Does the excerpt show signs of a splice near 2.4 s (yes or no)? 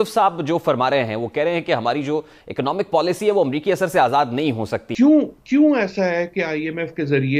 no